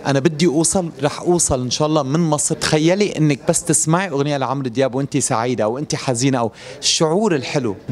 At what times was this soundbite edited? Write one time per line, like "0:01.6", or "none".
0:02.5